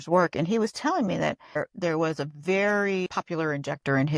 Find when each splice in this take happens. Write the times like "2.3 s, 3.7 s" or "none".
1.6 s, 3.1 s